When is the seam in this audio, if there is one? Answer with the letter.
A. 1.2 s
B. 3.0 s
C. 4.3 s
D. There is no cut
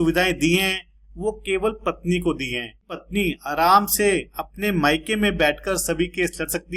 B